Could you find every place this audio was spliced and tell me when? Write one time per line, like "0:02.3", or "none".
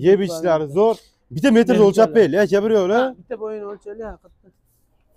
none